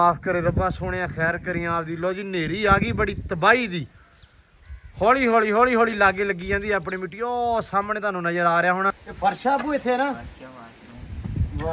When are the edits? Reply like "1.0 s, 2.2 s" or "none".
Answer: 9.1 s